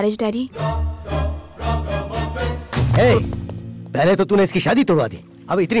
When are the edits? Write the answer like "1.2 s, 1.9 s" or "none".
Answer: 2.7 s